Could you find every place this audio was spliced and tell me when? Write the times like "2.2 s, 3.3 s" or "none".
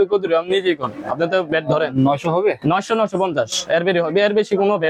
none